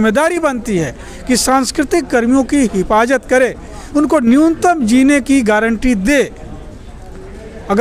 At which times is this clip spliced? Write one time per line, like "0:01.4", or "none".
none